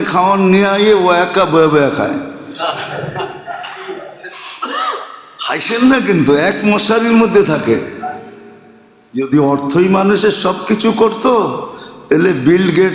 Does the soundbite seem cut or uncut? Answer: cut